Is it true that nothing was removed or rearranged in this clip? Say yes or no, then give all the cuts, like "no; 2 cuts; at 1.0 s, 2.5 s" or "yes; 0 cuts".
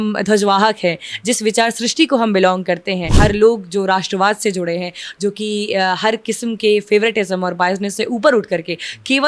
no; 1 cut; at 3.1 s